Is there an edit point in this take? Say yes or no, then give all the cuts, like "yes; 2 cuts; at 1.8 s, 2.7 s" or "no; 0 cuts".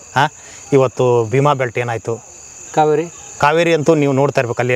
no; 0 cuts